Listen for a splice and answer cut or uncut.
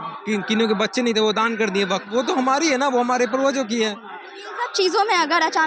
cut